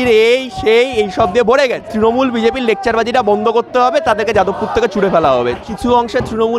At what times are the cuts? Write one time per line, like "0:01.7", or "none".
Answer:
0:01.9
0:05.6